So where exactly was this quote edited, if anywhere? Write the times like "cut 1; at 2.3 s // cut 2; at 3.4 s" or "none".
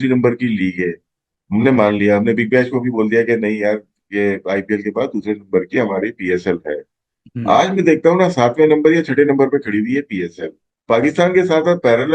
none